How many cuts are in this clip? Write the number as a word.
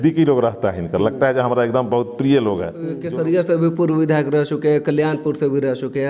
one